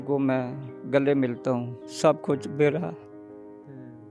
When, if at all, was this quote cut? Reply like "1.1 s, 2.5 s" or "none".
1.8 s

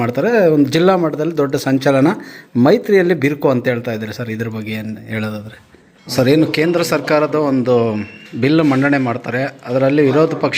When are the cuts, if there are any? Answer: 6.0 s

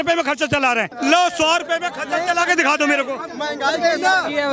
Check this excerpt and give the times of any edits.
0.9 s

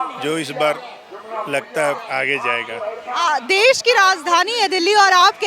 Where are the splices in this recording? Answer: none

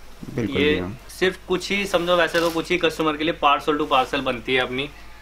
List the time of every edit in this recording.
1.0 s

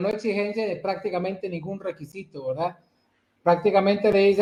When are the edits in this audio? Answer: none

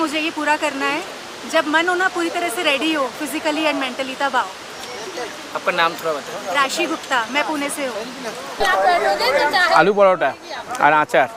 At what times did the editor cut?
none

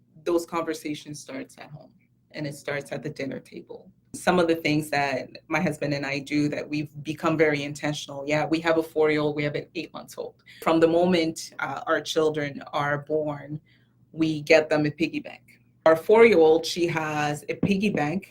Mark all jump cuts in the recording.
4.2 s, 10.6 s, 15.9 s

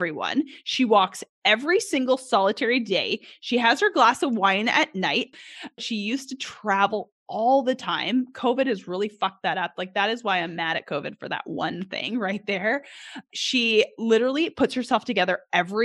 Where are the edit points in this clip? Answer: 5.5 s, 13.2 s

